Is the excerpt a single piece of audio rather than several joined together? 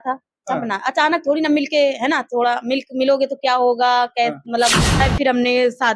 no; 1 cut; at 5.0 s

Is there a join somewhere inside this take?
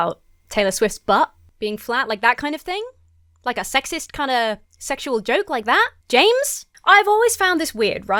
no; 0 cuts

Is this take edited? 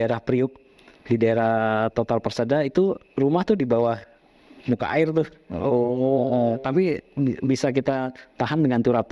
no; 0 cuts

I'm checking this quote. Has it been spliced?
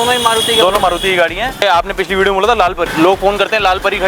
yes; 2 cuts; at 1.6 s, 2.8 s

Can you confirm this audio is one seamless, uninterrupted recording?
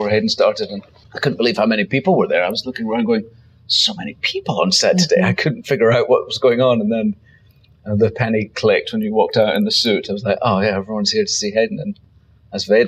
yes; 0 cuts

